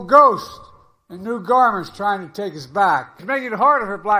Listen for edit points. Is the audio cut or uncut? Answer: cut